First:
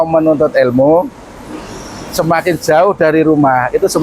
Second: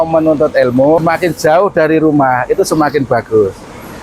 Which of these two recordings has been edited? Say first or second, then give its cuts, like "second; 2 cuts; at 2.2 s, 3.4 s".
second; 1 cut; at 1.0 s